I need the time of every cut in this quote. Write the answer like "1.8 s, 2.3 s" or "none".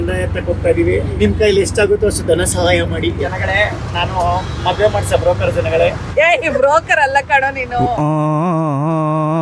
1.1 s, 3.2 s